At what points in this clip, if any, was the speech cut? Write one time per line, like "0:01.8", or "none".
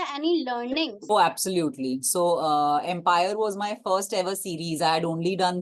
0:01.0